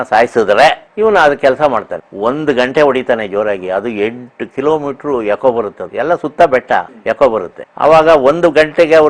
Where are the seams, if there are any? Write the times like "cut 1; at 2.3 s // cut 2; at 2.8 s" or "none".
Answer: cut 1; at 2.0 s // cut 2; at 5.8 s // cut 3; at 6.9 s // cut 4; at 7.6 s